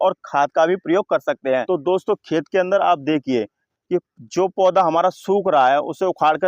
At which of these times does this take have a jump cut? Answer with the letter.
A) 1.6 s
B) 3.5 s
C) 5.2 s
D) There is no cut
A